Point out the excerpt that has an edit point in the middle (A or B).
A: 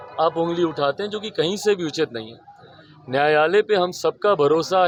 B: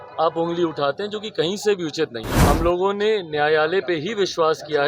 B